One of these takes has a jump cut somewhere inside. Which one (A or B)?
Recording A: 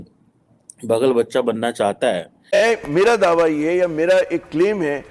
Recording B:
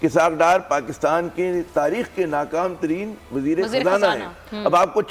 A